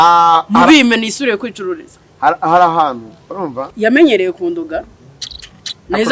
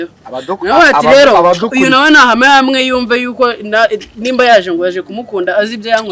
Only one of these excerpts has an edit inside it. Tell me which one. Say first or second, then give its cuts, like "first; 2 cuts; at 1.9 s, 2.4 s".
first; 1 cut; at 3.6 s